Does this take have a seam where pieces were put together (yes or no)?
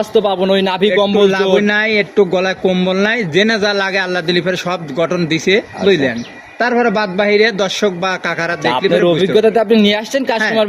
no